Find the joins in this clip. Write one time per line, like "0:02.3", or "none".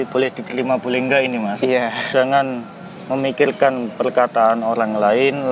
0:02.0